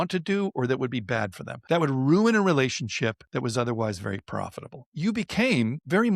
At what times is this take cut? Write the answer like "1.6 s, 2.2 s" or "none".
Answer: 1.5 s, 3.2 s, 4.9 s